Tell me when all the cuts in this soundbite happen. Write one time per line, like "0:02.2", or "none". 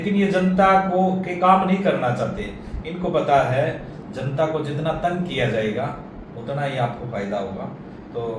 none